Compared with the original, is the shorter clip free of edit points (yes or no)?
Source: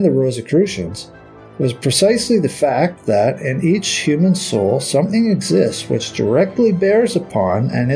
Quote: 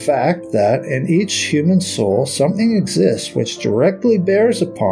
yes